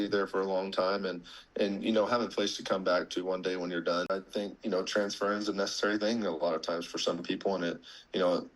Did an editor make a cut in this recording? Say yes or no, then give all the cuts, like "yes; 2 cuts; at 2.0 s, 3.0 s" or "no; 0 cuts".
yes; 1 cut; at 4.1 s